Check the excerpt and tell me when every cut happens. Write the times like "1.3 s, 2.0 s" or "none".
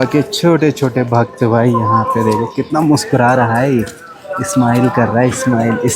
none